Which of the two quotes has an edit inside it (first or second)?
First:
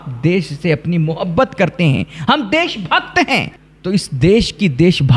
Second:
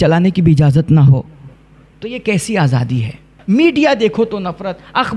second